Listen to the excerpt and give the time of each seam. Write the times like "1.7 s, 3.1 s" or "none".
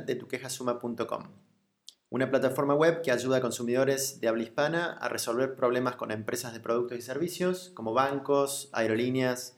4.1 s, 5.0 s, 7.7 s